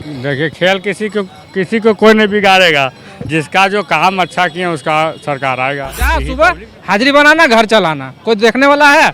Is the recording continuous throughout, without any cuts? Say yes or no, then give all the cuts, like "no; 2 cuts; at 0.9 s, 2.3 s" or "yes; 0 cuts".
no; 1 cut; at 6.3 s